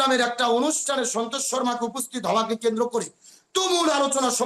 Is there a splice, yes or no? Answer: no